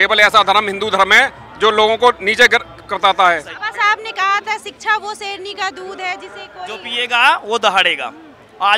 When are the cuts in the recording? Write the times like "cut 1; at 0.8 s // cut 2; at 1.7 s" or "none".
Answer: cut 1; at 3.6 s